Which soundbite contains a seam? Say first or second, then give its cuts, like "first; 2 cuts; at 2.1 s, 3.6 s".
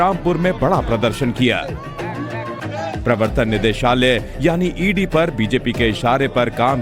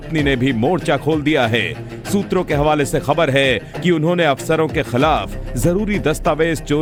first; 1 cut; at 4.8 s